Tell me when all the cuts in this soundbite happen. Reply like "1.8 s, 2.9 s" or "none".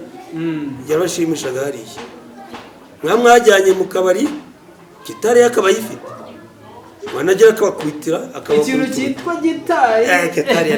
none